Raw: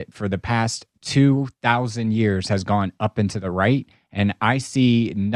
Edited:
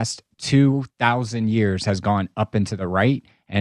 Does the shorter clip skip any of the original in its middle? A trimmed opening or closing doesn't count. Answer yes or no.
no